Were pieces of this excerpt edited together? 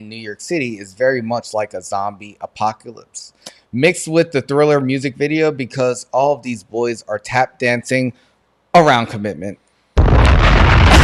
no; 0 cuts

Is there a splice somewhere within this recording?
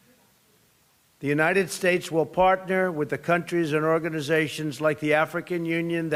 no; 0 cuts

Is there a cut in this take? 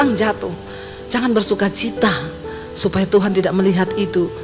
no; 0 cuts

